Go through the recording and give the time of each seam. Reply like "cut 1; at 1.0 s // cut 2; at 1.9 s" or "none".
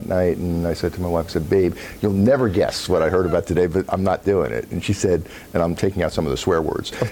none